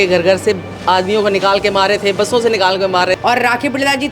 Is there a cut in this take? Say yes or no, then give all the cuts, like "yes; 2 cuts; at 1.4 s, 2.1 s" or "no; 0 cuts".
yes; 1 cut; at 3.2 s